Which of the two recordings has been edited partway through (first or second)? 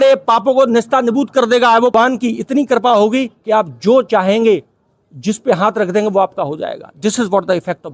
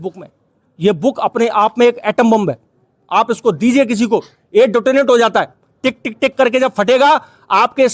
first